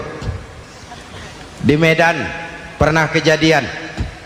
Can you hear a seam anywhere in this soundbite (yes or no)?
no